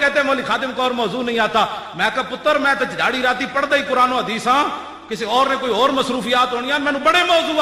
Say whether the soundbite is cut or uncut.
uncut